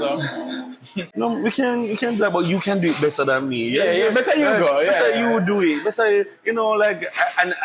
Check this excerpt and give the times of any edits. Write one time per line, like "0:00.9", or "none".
0:01.0